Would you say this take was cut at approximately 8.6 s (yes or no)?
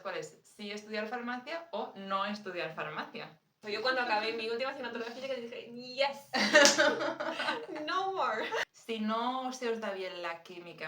yes